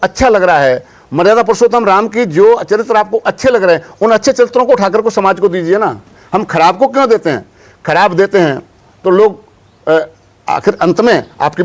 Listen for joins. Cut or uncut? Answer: uncut